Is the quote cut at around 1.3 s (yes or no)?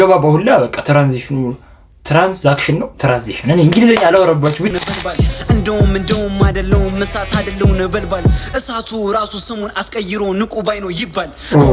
no